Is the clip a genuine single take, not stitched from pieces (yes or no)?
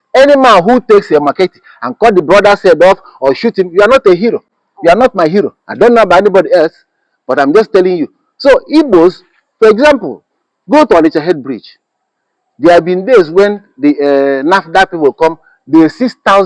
yes